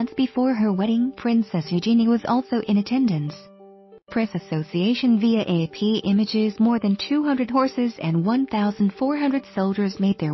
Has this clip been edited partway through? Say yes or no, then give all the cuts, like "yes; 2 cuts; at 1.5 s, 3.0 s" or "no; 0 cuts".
yes; 2 cuts; at 4.3 s, 6.0 s